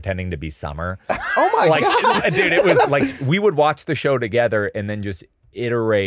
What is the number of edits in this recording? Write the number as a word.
one